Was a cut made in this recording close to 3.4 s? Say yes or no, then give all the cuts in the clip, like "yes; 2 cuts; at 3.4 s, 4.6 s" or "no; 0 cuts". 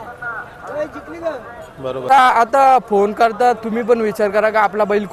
no; 1 cut; at 2.1 s